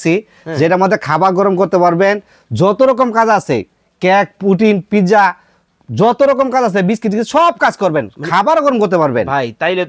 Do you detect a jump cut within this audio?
no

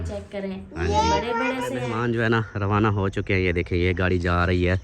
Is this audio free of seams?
no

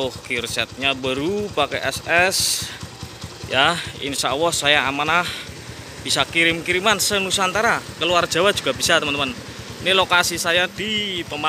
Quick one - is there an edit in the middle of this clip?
no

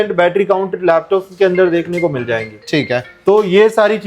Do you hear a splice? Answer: no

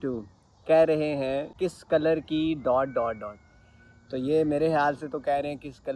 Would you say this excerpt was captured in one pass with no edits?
no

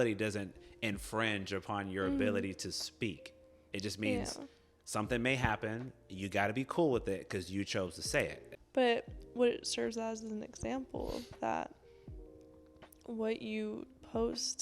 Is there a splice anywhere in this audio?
yes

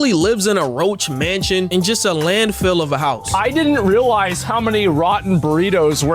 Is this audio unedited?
no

